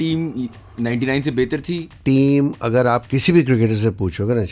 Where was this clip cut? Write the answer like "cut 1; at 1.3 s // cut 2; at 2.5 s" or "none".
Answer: cut 1; at 2.0 s